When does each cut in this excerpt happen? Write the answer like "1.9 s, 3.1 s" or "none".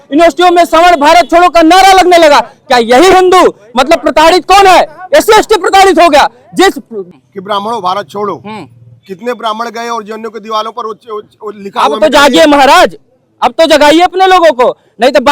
7.0 s